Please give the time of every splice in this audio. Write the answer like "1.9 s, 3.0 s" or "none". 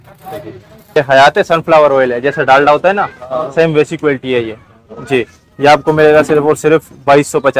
1.0 s